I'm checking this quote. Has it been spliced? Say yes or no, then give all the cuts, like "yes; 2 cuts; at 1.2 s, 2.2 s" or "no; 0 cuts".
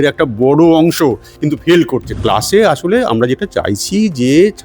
yes; 1 cut; at 2.2 s